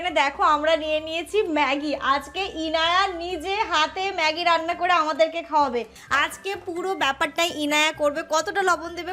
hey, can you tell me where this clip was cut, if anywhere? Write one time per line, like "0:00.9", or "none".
0:06.0